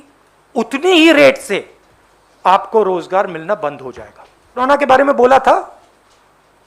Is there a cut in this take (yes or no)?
yes